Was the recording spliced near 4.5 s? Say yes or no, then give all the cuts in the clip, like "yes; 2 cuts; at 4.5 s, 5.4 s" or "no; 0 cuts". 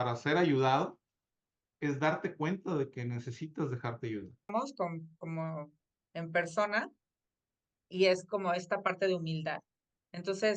yes; 1 cut; at 4.5 s